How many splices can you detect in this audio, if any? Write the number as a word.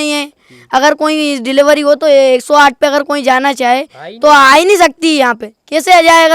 zero